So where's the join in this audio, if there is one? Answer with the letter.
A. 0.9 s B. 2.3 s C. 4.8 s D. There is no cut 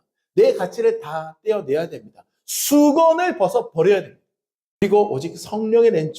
C